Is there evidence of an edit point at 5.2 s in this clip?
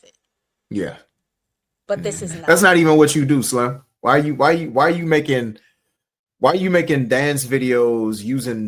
no; 1 cut; at 2.4 s

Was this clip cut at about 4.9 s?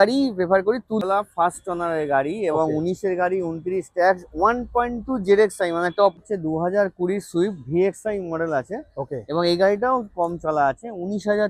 no; 2 cuts; at 1.0 s, 6.2 s

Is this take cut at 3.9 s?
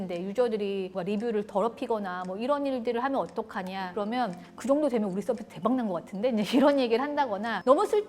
yes; 2 cuts; at 0.9 s, 3.9 s

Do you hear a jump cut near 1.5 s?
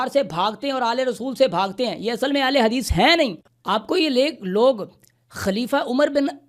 no; 1 cut; at 3.4 s

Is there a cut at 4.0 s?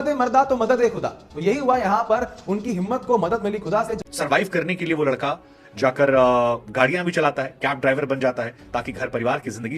yes; 1 cut; at 4.0 s

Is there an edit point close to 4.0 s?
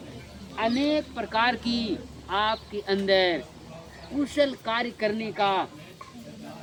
no; 0 cuts

